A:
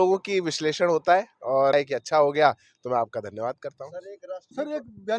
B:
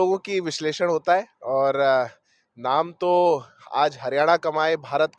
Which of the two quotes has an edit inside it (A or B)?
A